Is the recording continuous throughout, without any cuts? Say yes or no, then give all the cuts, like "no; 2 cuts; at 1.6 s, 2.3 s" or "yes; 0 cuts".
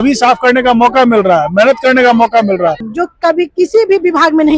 no; 1 cut; at 2.9 s